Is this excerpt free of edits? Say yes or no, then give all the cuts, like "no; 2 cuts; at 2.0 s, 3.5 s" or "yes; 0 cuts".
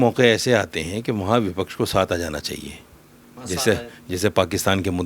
yes; 0 cuts